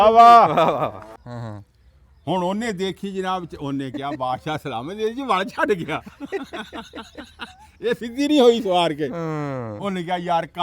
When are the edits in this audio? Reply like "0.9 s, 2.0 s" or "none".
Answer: 1.2 s